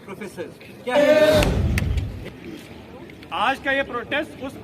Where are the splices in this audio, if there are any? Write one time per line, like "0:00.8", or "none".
0:01.0